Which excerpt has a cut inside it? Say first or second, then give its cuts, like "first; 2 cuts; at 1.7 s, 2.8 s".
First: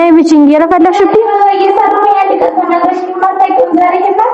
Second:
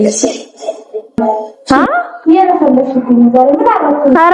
second; 1 cut; at 1.1 s